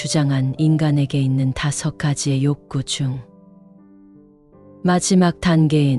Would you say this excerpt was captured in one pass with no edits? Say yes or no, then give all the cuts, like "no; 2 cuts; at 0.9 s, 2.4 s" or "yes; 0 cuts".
yes; 0 cuts